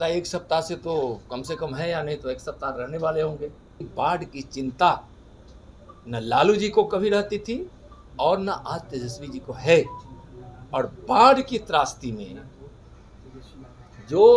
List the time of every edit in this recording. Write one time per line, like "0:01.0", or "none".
0:03.8